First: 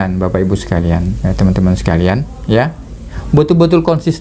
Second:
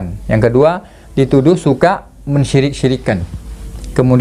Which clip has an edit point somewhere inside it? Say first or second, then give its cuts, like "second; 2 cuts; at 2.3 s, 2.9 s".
first; 1 cut; at 3.2 s